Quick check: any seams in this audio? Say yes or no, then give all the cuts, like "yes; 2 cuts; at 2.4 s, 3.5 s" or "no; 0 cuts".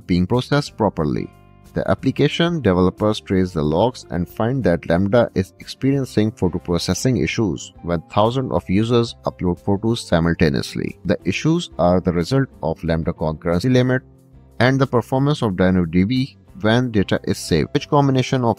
yes; 2 cuts; at 11.0 s, 17.7 s